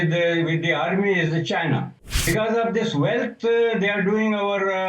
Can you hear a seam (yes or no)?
yes